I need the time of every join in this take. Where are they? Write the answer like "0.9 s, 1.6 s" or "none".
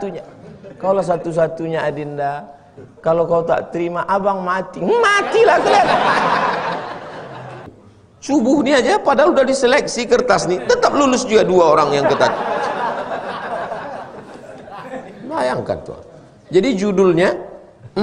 7.7 s